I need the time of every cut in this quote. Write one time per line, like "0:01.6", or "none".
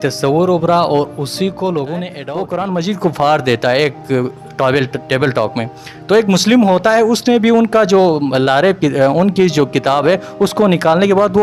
0:02.2